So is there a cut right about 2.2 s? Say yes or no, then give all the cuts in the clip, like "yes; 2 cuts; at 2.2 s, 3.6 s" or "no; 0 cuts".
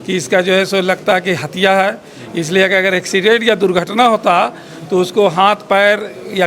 no; 0 cuts